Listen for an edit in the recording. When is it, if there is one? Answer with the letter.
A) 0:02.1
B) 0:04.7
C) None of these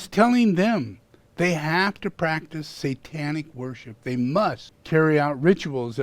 B